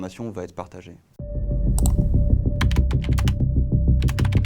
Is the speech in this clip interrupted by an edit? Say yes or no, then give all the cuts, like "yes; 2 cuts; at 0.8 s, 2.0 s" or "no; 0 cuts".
no; 0 cuts